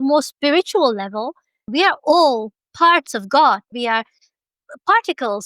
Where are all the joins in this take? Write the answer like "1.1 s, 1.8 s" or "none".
1.6 s, 3.7 s